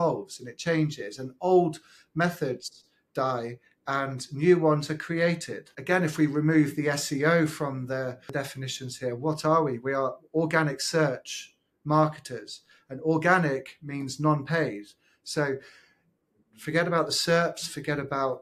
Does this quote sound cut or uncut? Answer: uncut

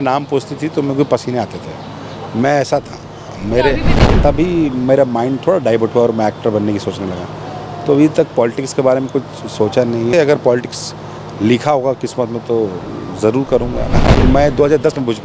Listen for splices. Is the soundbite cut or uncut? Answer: cut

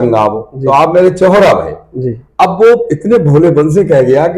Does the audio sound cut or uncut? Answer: uncut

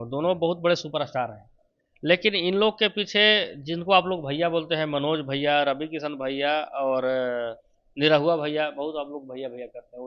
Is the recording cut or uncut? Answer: uncut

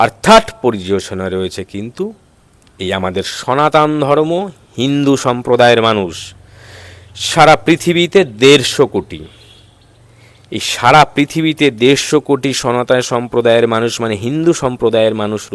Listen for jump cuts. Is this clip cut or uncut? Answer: uncut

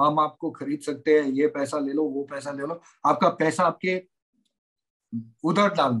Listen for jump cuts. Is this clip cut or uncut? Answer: uncut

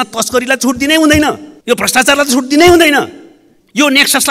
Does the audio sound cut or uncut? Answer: cut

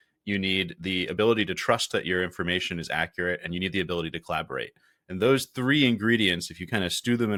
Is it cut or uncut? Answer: uncut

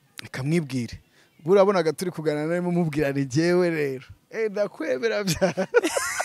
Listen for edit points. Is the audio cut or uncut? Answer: uncut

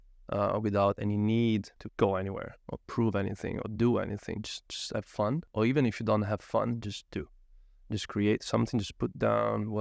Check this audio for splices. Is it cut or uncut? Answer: cut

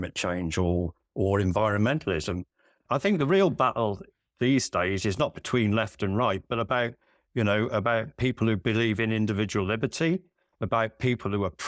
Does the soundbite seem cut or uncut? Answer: cut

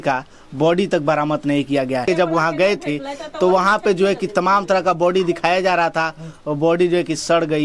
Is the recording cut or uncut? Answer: cut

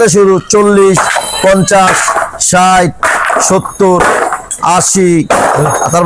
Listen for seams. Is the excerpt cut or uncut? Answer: uncut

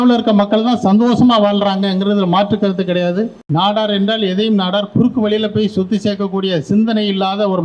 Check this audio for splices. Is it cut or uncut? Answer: cut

